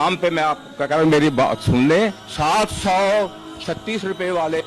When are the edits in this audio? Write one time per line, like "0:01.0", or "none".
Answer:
0:02.2